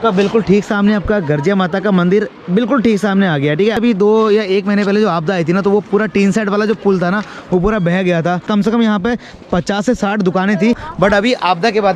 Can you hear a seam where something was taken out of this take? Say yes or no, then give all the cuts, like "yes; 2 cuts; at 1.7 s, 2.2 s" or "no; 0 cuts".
yes; 2 cuts; at 3.8 s, 8.5 s